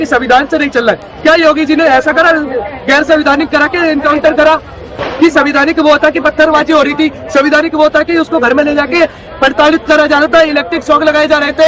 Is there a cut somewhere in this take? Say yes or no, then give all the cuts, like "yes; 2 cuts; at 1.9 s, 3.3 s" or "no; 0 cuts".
no; 0 cuts